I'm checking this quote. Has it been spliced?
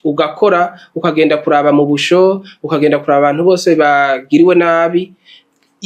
no; 0 cuts

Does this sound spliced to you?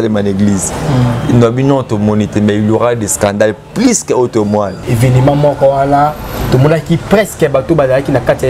yes; 1 cut; at 4.9 s

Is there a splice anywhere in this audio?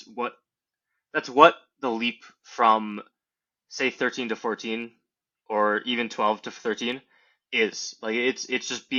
no; 0 cuts

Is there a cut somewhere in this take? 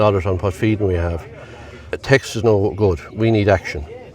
yes; 1 cut; at 2.0 s

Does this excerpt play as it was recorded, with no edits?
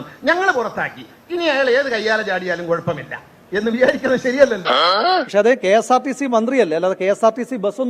no; 1 cut; at 4.8 s

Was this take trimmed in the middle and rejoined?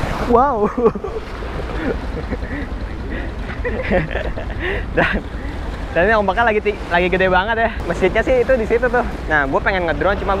yes; 2 cuts; at 7.8 s, 9.2 s

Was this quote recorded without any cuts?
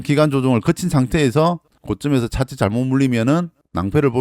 no; 1 cut; at 1.7 s

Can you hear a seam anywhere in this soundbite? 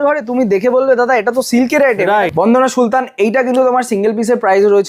yes; 1 cut; at 2.3 s

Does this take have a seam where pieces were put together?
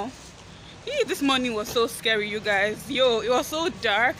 no; 0 cuts

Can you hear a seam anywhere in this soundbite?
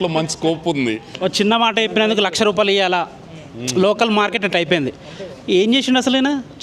yes; 1 cut; at 1.1 s

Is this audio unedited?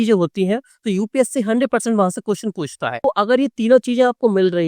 no; 1 cut; at 3.0 s

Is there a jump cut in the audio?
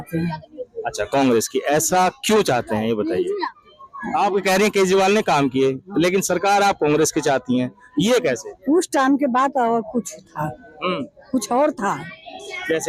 no; 0 cuts

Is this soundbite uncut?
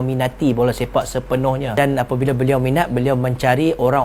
yes; 0 cuts

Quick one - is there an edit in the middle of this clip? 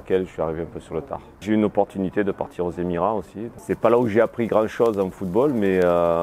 yes; 2 cuts; at 1.3 s, 3.5 s

